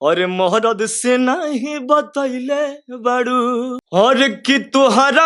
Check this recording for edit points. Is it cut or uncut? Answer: cut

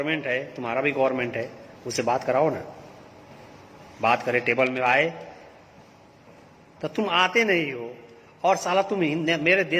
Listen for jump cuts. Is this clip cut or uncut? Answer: uncut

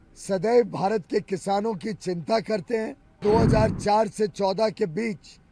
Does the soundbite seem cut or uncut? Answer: cut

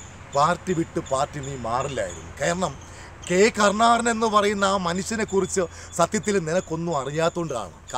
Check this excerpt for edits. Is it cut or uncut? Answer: uncut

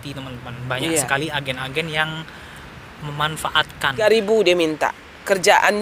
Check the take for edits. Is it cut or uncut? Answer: cut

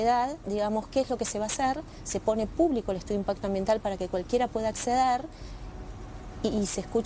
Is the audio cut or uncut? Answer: uncut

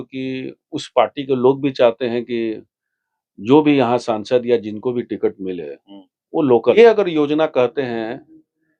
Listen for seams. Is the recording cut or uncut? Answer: cut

